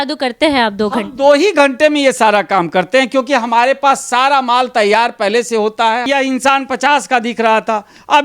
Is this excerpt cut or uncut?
cut